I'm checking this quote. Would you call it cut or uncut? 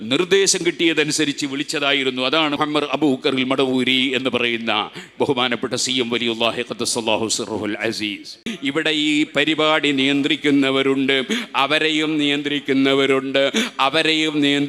cut